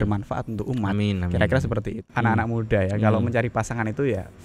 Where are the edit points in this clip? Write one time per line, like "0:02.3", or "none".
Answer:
0:02.0